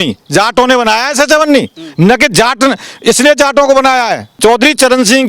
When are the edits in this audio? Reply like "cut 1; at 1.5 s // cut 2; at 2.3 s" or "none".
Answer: cut 1; at 4.4 s